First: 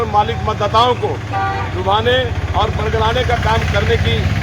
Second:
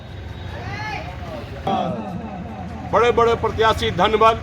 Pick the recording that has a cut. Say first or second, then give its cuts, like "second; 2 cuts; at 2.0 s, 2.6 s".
second; 1 cut; at 1.7 s